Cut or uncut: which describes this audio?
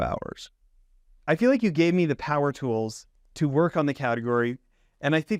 cut